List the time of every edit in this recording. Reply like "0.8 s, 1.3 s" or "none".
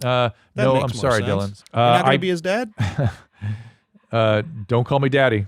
1.6 s, 2.8 s